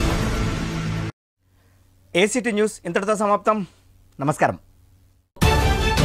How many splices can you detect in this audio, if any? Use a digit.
0